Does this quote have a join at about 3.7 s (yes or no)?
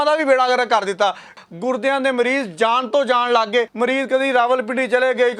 yes